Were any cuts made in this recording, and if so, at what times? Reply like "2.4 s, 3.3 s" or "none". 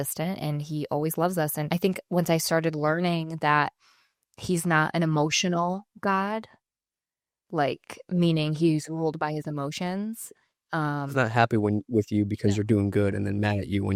none